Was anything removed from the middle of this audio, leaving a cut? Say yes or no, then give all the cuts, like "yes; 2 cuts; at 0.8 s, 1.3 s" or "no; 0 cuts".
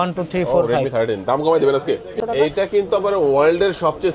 yes; 1 cut; at 2.1 s